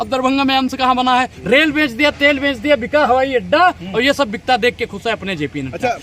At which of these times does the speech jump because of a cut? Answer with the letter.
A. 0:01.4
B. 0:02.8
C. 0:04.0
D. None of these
A